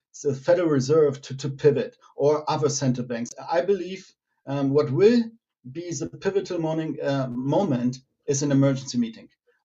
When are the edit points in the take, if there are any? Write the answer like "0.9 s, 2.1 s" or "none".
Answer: 3.3 s